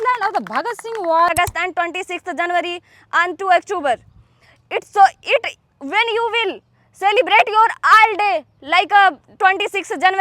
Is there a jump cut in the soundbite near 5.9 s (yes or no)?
no